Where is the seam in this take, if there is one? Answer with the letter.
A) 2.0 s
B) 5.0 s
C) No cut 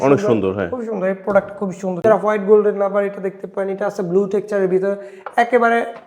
A